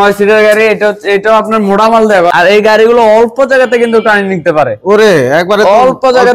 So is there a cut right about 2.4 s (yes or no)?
yes